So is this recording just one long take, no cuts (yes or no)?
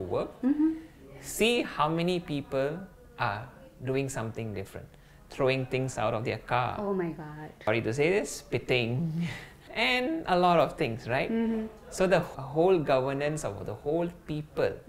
no